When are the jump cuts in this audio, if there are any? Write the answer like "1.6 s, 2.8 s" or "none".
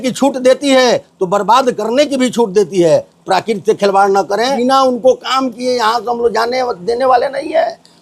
4.6 s